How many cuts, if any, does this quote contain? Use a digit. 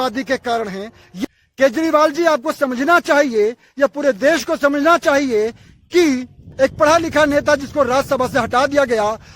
1